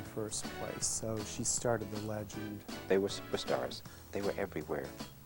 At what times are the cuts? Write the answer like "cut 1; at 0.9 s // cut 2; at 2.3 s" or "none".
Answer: cut 1; at 2.7 s // cut 2; at 4.0 s